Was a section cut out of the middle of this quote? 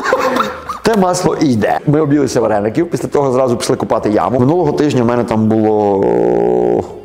yes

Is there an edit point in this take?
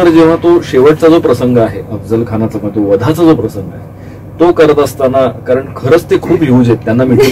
no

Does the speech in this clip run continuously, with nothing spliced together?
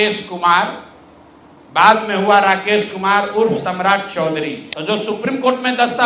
no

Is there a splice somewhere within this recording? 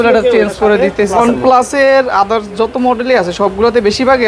yes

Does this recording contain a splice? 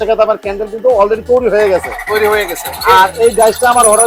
no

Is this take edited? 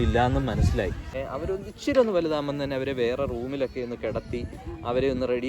yes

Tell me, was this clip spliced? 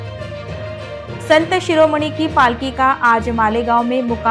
no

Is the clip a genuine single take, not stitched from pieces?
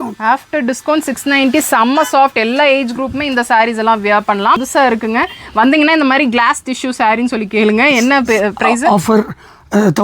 no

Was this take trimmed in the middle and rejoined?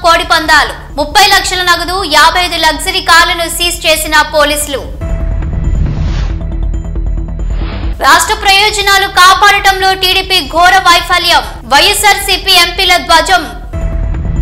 no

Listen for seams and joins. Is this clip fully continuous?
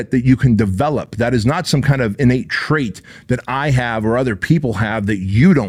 yes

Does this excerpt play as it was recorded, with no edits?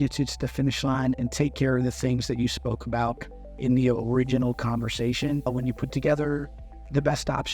no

